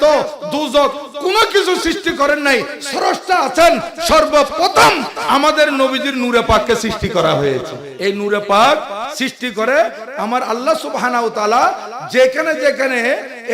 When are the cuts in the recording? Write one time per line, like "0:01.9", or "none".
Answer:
0:07.8